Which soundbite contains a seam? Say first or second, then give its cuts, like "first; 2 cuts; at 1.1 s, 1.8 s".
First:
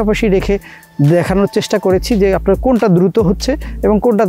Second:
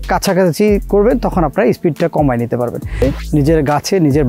second; 1 cut; at 3.0 s